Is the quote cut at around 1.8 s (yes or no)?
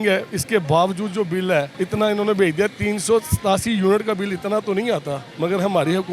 yes